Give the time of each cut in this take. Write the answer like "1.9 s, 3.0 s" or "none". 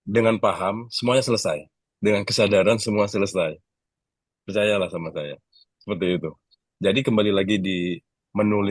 none